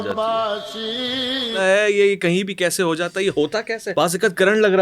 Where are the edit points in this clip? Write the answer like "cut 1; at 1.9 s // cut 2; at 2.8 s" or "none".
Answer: cut 1; at 1.6 s // cut 2; at 3.8 s

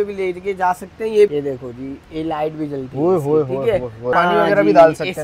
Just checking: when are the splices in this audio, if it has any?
cut 1; at 1.3 s // cut 2; at 4.1 s

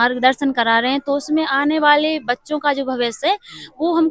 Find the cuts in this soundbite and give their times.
none

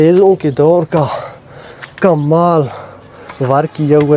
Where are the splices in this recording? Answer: none

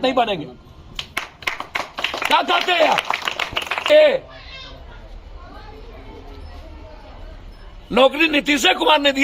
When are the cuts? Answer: cut 1; at 3.9 s

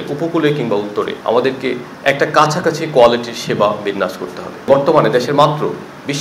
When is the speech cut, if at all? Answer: cut 1; at 1.2 s // cut 2; at 4.7 s

